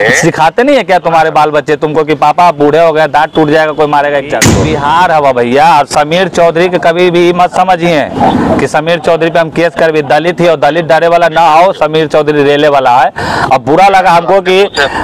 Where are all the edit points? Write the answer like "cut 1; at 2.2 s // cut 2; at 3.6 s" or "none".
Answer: cut 1; at 4.6 s

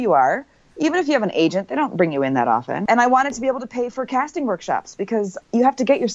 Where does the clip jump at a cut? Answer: cut 1; at 2.8 s

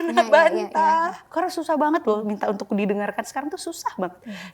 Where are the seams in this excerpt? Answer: cut 1; at 1.2 s

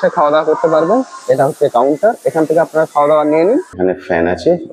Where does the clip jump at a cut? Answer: cut 1; at 3.7 s

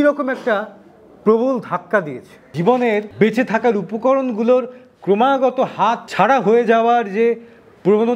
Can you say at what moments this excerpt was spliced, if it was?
cut 1; at 2.5 s // cut 2; at 3.1 s // cut 3; at 6.0 s

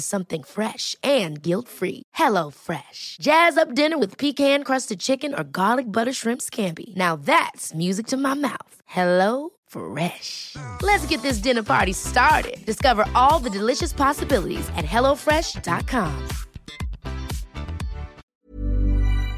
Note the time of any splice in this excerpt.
cut 1; at 18.2 s

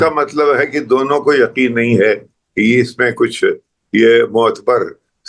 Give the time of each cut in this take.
none

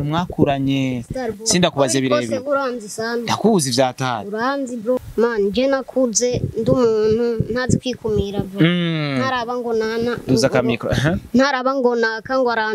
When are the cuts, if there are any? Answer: cut 1; at 5.0 s

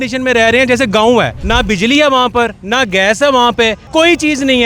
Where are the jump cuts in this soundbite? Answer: cut 1; at 1.4 s // cut 2; at 3.8 s

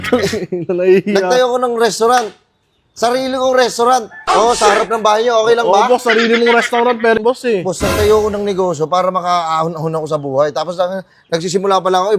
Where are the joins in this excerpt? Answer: cut 1; at 7.2 s

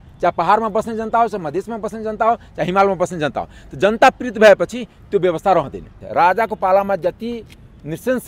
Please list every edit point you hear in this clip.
cut 1; at 6.0 s

